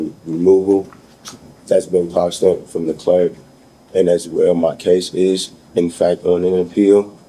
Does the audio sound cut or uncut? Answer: uncut